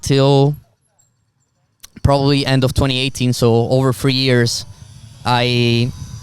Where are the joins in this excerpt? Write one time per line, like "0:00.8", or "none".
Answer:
none